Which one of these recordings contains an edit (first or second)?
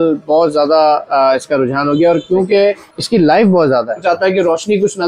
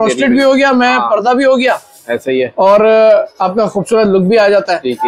first